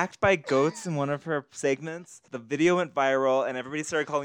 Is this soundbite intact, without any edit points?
no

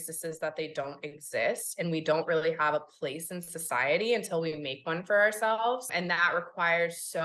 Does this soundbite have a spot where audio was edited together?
yes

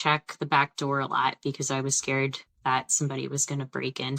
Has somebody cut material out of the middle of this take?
no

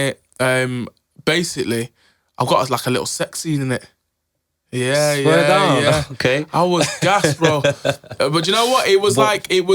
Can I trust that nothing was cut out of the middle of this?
yes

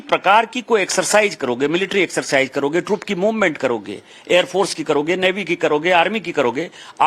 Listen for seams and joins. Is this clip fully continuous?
no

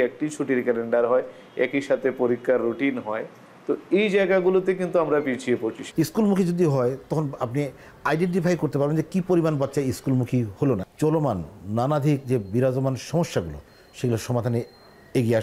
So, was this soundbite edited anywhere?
yes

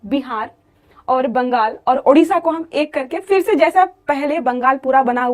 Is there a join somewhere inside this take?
no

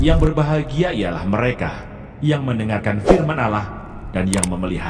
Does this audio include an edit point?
no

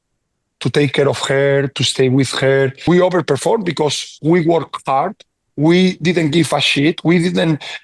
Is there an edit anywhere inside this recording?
yes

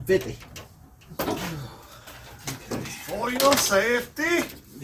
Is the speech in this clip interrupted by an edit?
yes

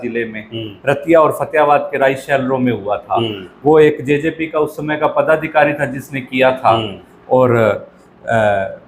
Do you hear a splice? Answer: no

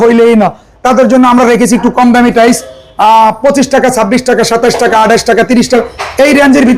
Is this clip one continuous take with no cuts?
yes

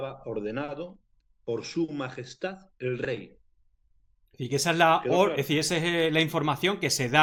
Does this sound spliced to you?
no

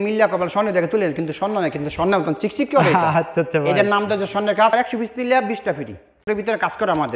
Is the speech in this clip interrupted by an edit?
yes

